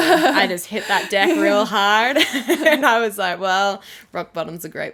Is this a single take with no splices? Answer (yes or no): yes